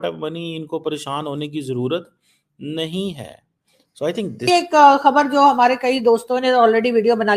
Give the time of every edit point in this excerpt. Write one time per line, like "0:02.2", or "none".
0:04.5